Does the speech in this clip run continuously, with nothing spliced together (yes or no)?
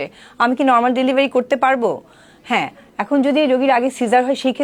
yes